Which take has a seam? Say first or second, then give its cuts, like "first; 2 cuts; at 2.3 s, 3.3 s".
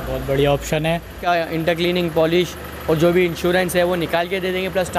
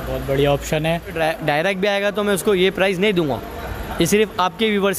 first; 1 cut; at 1.2 s